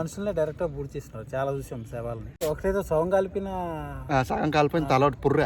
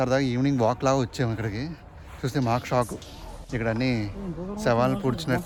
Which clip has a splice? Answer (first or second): first